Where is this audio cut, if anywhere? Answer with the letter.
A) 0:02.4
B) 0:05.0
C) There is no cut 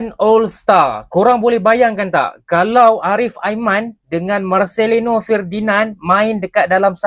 C